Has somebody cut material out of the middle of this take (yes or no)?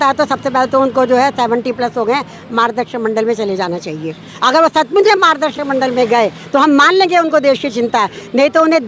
no